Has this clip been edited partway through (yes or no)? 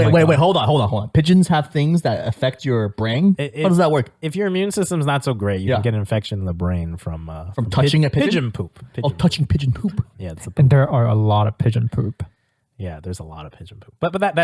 no